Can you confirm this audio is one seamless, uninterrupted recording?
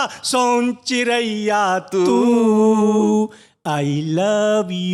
yes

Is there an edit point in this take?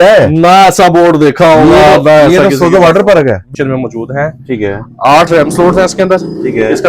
yes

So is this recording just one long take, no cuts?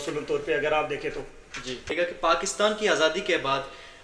no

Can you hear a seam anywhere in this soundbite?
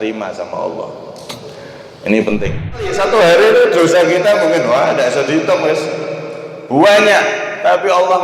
yes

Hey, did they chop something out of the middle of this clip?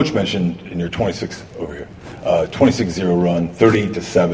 no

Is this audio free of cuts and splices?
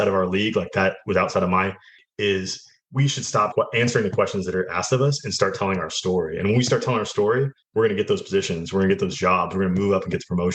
no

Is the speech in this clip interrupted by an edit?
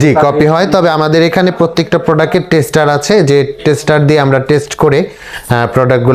no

